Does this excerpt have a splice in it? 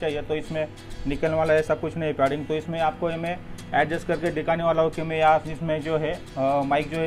no; 0 cuts

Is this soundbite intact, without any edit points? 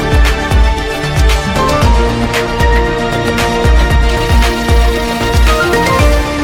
yes; 0 cuts

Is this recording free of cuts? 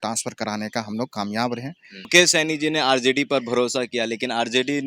no; 1 cut; at 2.1 s

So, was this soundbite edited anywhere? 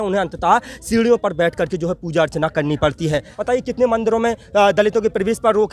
yes; 1 cut; at 3.3 s

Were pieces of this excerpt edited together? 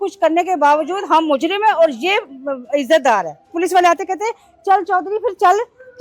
yes; 1 cut; at 3.5 s

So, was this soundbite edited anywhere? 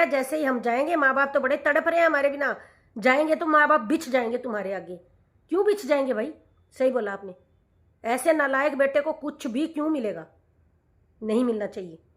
no; 0 cuts

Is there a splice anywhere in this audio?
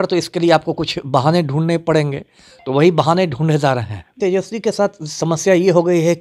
yes; 1 cut; at 4.1 s

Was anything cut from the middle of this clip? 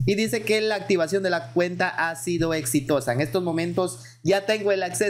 no; 0 cuts

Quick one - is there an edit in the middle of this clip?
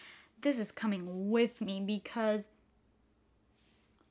no; 0 cuts

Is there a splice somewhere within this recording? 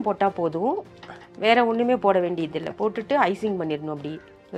no; 0 cuts

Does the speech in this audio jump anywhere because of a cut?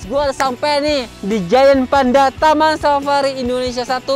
yes; 1 cut; at 1.1 s

